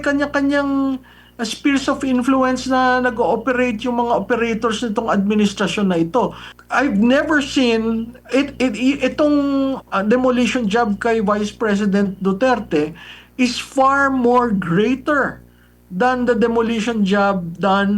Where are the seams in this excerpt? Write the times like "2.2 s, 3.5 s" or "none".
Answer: 6.5 s

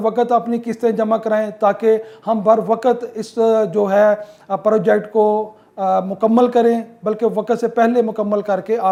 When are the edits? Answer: none

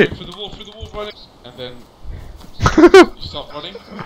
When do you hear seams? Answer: 1.2 s

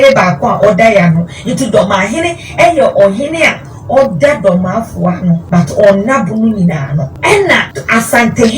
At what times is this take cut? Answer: 5.4 s, 7.1 s, 7.7 s

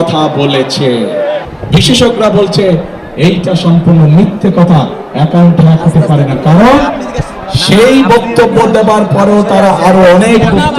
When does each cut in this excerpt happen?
1.4 s

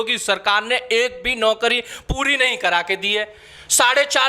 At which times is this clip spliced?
none

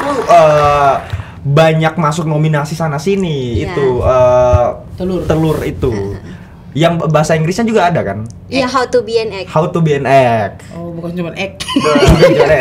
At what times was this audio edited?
none

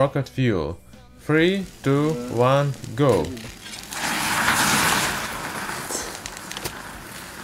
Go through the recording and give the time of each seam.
none

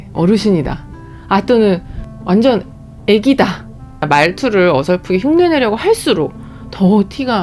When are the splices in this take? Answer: 2.0 s, 4.0 s

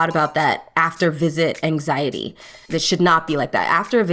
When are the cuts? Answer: 2.7 s

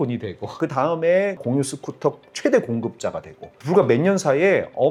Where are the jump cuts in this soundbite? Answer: none

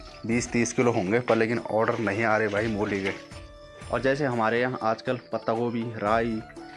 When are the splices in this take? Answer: none

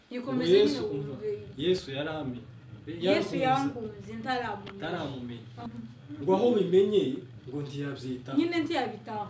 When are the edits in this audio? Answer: 5.6 s

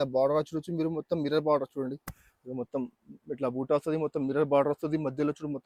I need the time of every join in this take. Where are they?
none

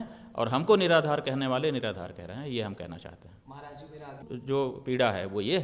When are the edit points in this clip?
none

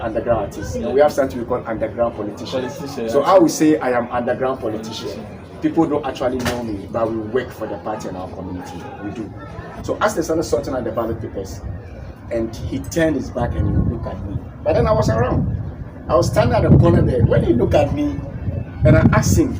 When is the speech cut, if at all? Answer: 9.7 s

